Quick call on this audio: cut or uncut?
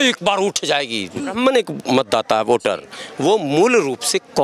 cut